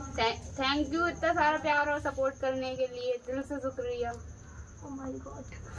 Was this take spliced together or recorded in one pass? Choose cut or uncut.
uncut